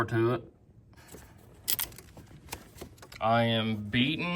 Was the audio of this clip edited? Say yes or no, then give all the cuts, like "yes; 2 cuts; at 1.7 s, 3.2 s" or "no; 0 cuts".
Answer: yes; 2 cuts; at 0.9 s, 3.1 s